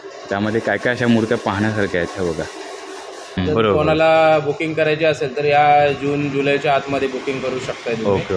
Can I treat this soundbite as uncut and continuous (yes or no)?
no